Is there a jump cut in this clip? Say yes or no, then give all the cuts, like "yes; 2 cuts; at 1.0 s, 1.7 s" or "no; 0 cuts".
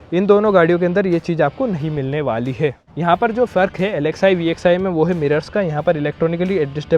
yes; 1 cut; at 2.9 s